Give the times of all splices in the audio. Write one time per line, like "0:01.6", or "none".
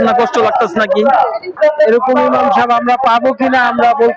0:01.5